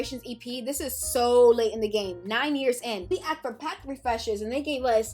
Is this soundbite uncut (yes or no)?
no